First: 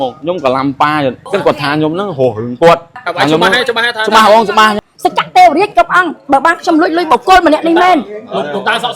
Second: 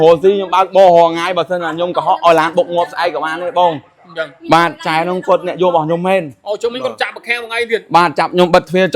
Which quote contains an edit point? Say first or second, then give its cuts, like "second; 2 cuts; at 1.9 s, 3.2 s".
first; 3 cuts; at 1.2 s, 3.0 s, 4.8 s